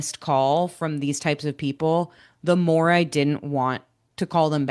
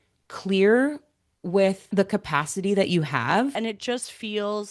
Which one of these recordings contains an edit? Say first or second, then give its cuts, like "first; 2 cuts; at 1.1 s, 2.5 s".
second; 2 cuts; at 1.9 s, 3.5 s